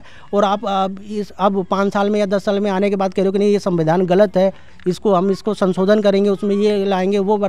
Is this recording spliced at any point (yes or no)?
no